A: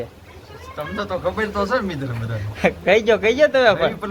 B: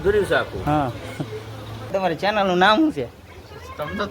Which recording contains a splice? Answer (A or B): B